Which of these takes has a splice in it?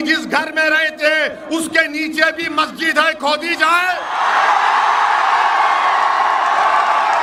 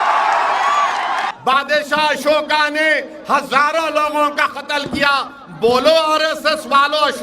second; 1 cut; at 1.3 s

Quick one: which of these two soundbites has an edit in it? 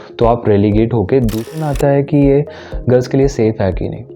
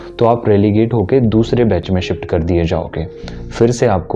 first; 1 cut; at 1.5 s

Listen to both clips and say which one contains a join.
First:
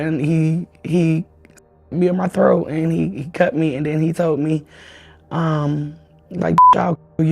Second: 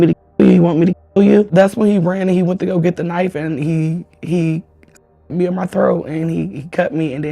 second; 1 cut; at 1.5 s

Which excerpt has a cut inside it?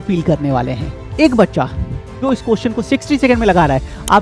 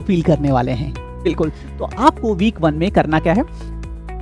first; 1 cut; at 1.0 s

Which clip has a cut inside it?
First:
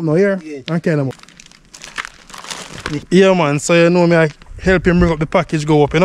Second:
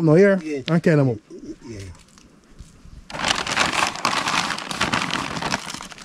first; 2 cuts; at 1.1 s, 3.0 s

